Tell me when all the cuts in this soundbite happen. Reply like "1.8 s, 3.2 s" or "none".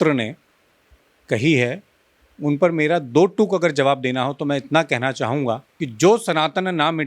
5.8 s